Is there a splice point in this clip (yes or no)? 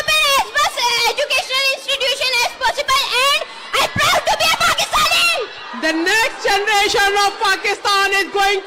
no